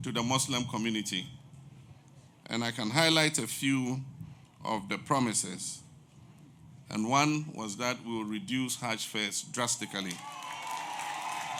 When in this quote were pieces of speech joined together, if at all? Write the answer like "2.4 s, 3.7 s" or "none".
none